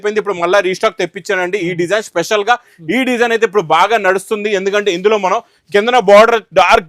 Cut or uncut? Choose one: uncut